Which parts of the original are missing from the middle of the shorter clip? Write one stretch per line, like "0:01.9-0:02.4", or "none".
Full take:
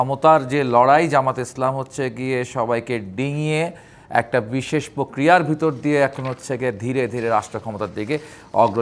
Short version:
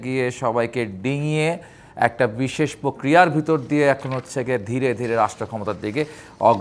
none